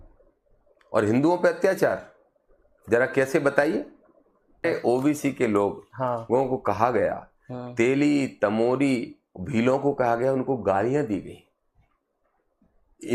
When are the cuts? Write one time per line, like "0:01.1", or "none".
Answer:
0:04.6